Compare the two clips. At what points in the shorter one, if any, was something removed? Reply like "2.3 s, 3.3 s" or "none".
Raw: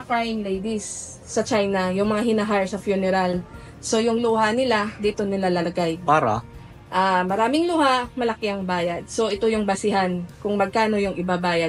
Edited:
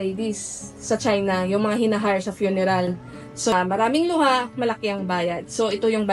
3.5 s